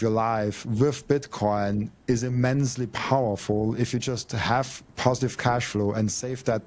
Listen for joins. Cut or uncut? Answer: uncut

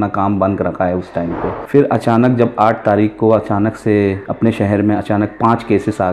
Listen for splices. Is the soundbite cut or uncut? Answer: cut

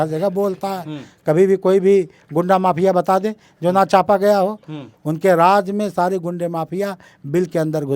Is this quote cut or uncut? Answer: uncut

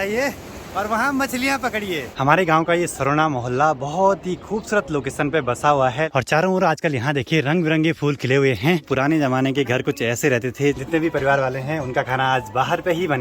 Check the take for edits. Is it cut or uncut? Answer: cut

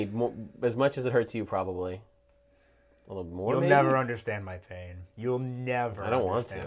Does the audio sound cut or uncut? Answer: uncut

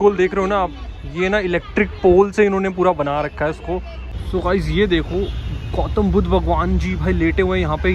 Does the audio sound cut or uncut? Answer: cut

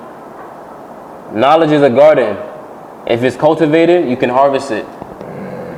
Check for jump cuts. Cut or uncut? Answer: uncut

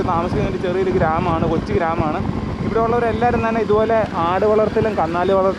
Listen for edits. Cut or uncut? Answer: uncut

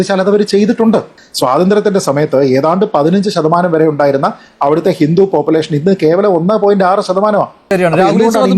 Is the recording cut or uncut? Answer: cut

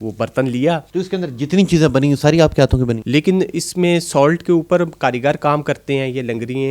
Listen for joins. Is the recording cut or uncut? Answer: cut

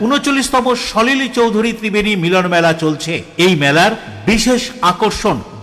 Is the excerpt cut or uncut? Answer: uncut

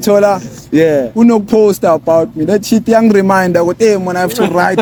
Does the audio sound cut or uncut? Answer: uncut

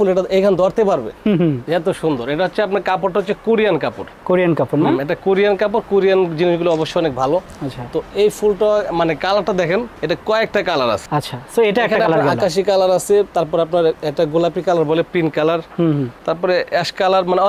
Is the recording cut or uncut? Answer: uncut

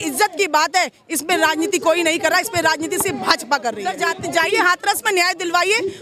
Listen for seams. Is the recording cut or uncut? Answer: cut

